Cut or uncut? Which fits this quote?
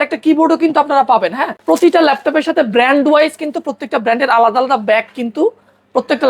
cut